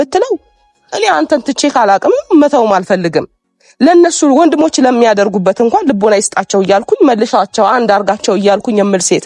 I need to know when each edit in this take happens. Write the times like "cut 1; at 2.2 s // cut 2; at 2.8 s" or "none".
none